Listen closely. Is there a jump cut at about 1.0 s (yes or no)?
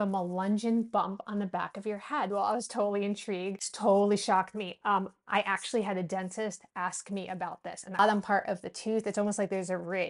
no